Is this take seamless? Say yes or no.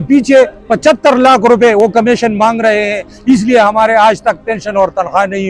yes